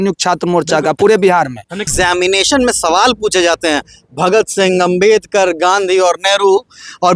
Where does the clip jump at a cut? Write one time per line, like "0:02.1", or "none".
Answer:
0:01.9